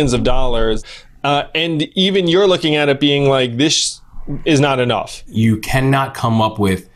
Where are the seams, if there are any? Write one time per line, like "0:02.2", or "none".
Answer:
0:00.8
0:05.2